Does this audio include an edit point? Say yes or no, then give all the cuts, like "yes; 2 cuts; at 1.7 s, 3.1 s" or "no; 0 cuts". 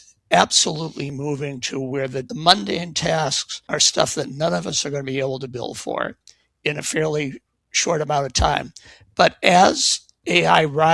yes; 2 cuts; at 2.3 s, 3.7 s